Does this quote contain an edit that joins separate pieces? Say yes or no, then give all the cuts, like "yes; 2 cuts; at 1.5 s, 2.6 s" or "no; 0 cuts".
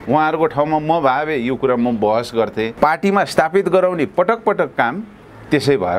yes; 1 cut; at 2.7 s